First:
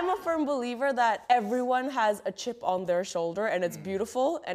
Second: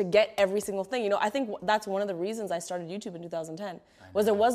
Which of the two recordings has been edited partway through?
first; 1 cut; at 1.2 s

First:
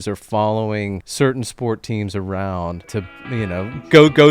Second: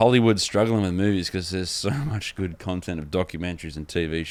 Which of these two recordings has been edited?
first; 2 cuts; at 1.0 s, 2.9 s

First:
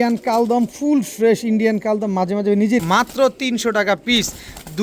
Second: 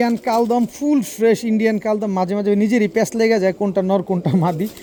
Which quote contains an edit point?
first; 1 cut; at 2.8 s

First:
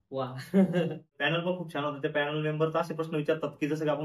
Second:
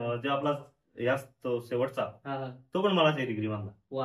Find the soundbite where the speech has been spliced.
first; 1 cut; at 1.2 s

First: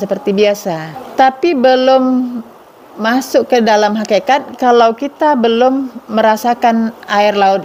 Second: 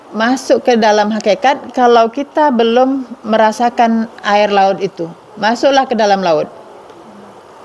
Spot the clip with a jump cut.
first; 1 cut; at 1.0 s

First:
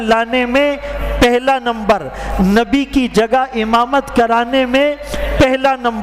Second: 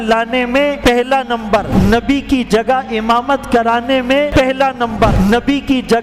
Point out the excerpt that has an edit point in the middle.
second; 4 cuts; at 0.8 s, 1.7 s, 4.3 s, 5.1 s

